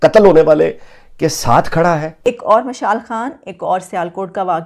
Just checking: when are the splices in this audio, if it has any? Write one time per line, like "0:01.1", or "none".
0:02.2